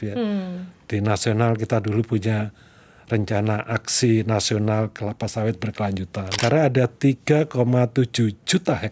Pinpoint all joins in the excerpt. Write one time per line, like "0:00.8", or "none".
0:06.3